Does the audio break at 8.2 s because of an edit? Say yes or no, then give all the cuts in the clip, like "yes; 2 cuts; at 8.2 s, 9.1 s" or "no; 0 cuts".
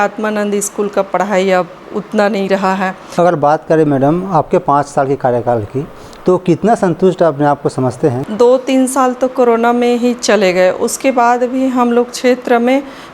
yes; 2 cuts; at 3.0 s, 8.2 s